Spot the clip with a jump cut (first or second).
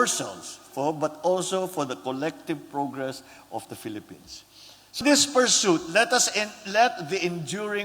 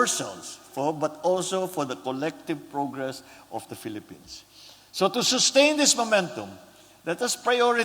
first